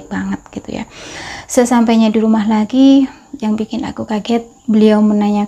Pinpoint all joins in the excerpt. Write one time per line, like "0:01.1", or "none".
0:01.2